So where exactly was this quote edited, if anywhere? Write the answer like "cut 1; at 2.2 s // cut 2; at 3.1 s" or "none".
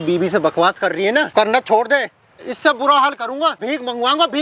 cut 1; at 1.3 s // cut 2; at 2.4 s // cut 3; at 3.6 s